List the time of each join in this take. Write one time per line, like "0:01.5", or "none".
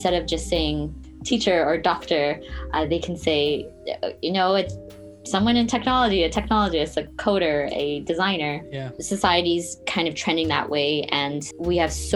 none